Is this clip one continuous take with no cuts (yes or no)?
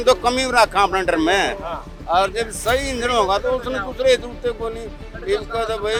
yes